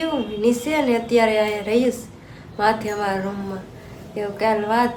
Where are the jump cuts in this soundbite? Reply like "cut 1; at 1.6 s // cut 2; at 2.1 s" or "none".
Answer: none